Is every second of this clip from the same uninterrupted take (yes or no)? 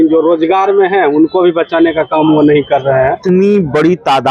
no